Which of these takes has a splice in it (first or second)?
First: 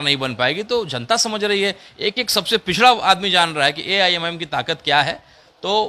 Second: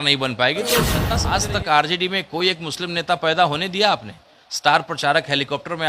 second